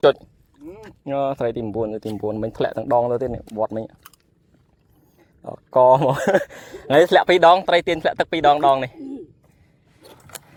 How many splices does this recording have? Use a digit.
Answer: 0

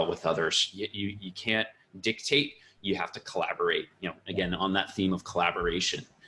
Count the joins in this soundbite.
0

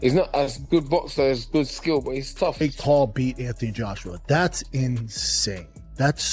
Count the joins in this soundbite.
1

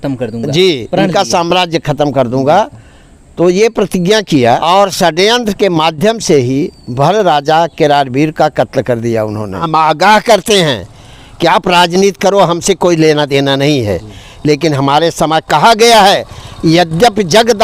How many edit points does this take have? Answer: 2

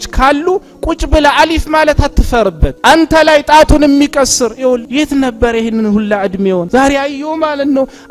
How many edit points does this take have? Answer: 3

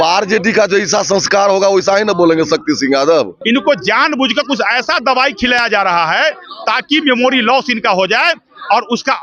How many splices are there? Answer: 1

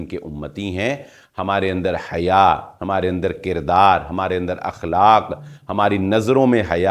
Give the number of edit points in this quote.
0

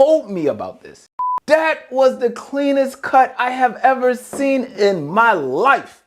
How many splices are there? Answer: 1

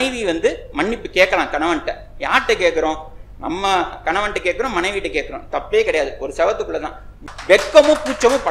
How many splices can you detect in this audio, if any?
1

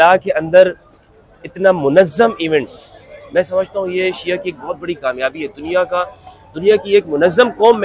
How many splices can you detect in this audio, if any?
0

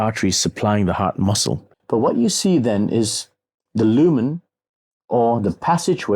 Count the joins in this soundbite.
1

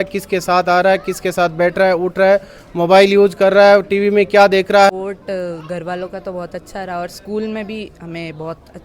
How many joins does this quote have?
1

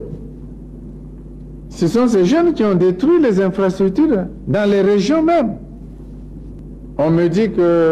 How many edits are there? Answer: 1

